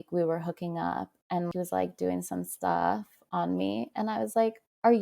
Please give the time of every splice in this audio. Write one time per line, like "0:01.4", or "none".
0:01.5